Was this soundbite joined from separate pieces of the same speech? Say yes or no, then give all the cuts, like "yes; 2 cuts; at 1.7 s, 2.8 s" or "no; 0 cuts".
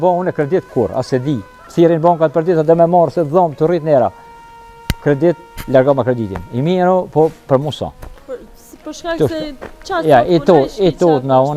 no; 0 cuts